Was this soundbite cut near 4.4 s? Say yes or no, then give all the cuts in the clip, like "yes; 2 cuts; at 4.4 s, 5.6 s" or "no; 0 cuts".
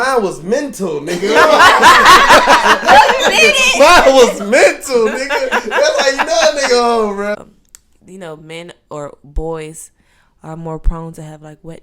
no; 1 cut; at 7.5 s